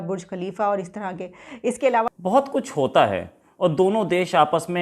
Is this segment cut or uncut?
cut